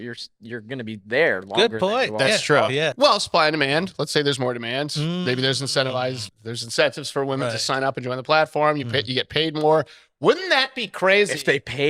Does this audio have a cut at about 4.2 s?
no; 2 cuts; at 2.9 s, 6.3 s

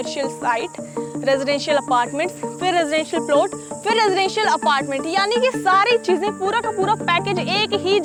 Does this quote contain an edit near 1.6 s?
no; 0 cuts

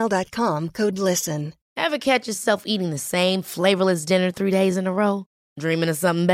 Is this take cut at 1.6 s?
yes; 1 cut; at 1.6 s

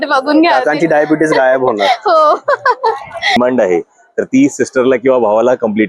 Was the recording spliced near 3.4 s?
yes; 1 cut; at 3.4 s

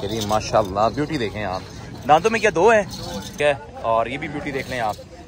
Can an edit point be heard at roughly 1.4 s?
no; 1 cut; at 3.3 s

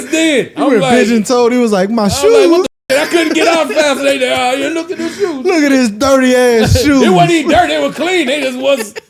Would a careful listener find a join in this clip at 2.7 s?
no; 0 cuts

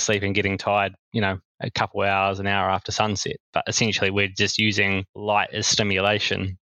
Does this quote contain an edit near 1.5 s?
no; 1 cut; at 5.1 s

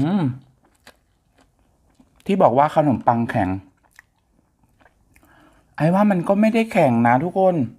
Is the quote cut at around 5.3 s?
no; 1 cut; at 1.9 s

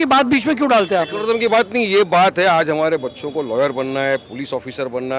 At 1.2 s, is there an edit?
no; 0 cuts

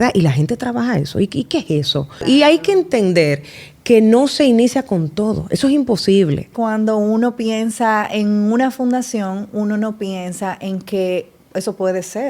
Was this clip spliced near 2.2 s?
yes; 2 cuts; at 2.2 s, 6.5 s

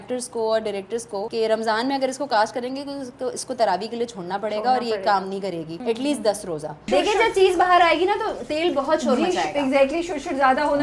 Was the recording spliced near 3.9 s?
no; 3 cuts; at 1.3 s, 5.7 s, 6.8 s

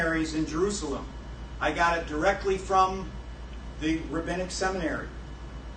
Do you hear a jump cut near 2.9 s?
no; 1 cut; at 1.1 s

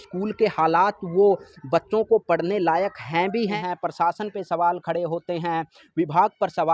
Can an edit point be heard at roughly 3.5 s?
yes; 1 cut; at 3.5 s

